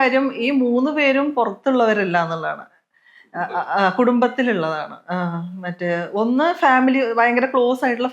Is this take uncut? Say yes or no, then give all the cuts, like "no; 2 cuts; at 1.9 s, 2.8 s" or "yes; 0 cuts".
yes; 0 cuts